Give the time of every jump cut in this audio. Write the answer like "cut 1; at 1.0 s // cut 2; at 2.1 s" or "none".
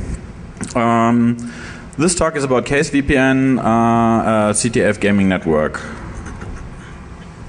cut 1; at 4.8 s